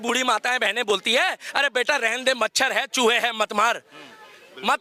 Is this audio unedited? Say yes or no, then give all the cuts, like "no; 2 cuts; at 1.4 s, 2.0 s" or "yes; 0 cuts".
yes; 0 cuts